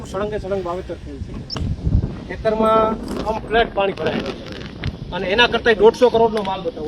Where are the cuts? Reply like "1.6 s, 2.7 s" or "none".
1.5 s